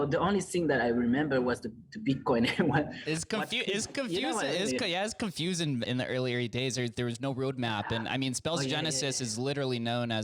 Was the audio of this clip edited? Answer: yes; 2 cuts; at 3.0 s, 5.9 s

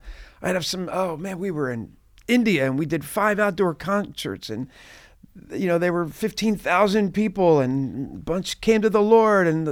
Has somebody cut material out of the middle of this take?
no; 0 cuts

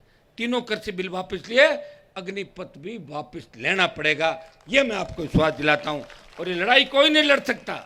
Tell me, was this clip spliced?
no; 0 cuts

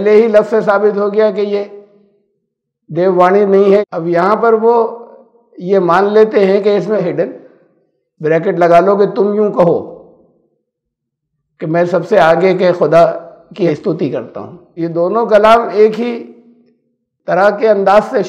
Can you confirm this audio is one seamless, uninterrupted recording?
no; 4 cuts; at 3.8 s, 7.0 s, 13.7 s, 14.6 s

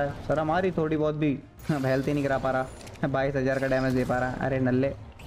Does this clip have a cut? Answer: yes; 1 cut; at 1.5 s

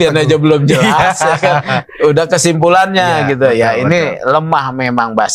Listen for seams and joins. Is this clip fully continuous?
yes; 0 cuts

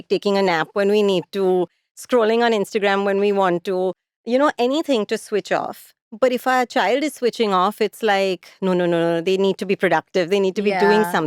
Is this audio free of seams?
yes; 0 cuts

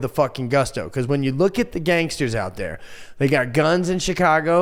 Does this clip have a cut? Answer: no; 0 cuts

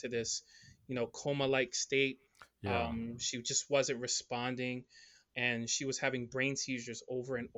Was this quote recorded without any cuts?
yes; 0 cuts

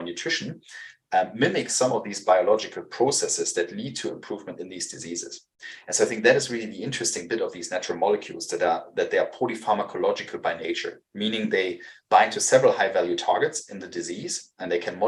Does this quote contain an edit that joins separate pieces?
no; 0 cuts

